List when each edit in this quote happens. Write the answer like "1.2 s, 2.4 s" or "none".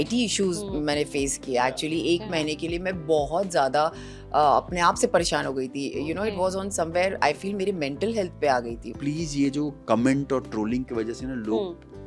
8.8 s